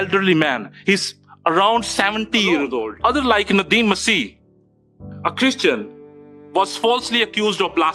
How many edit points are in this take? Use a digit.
1